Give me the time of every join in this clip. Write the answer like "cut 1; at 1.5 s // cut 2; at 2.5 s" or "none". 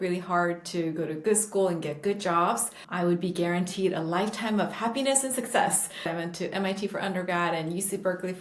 cut 1; at 2.8 s // cut 2; at 6.1 s